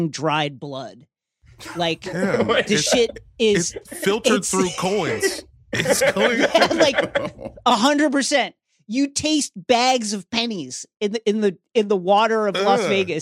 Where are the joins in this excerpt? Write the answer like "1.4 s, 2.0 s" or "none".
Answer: none